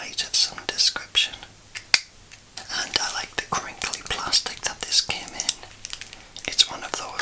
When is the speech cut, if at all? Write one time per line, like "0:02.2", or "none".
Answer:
0:01.6
0:02.5